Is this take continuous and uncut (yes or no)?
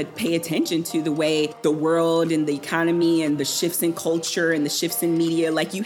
no